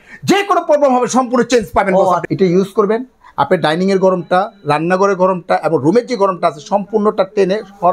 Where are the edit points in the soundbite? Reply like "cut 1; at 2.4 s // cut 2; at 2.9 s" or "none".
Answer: cut 1; at 2.2 s

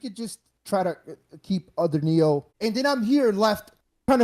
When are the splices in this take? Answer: cut 1; at 2.5 s

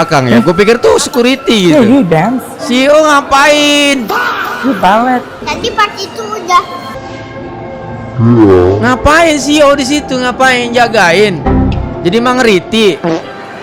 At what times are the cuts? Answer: none

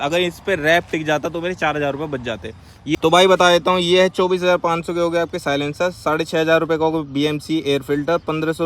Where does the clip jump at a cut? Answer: cut 1; at 3.0 s

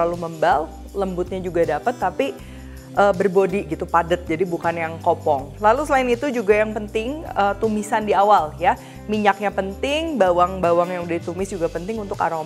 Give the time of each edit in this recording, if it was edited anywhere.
none

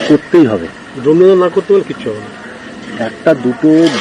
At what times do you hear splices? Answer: none

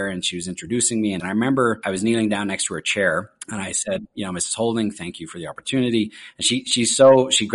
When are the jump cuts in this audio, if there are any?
cut 1; at 1.2 s // cut 2; at 1.8 s // cut 3; at 3.4 s

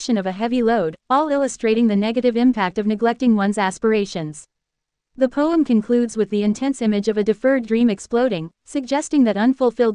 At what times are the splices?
none

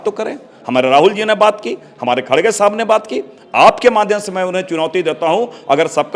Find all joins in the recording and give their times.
none

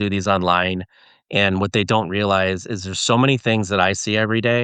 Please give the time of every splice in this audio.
none

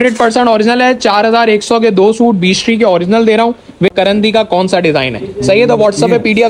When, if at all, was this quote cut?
cut 1; at 3.9 s

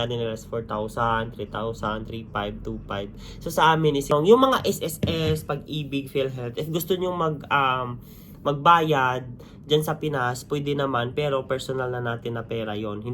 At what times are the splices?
cut 1; at 4.1 s

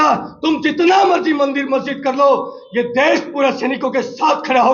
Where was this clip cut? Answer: none

